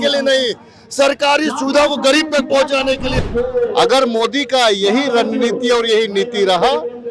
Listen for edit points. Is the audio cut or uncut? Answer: cut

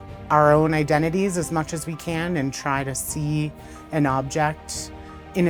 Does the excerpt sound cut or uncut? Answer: uncut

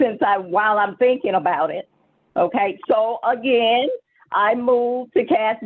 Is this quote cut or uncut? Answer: uncut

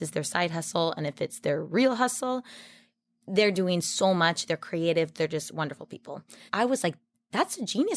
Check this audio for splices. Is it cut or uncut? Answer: cut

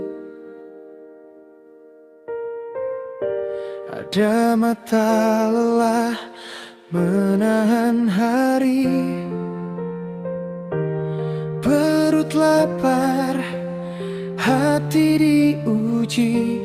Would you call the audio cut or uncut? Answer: uncut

